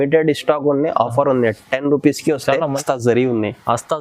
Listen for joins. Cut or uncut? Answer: cut